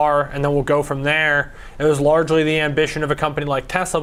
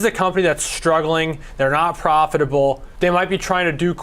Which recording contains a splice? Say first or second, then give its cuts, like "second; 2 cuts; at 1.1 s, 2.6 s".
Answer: second; 1 cut; at 2.9 s